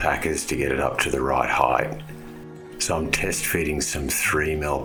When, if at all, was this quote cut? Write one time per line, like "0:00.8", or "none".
none